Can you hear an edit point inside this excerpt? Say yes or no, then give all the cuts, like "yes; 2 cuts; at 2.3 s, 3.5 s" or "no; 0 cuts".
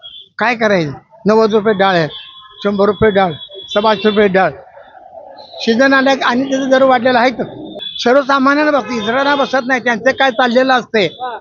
yes; 1 cut; at 7.8 s